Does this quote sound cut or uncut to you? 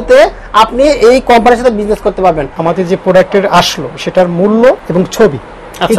cut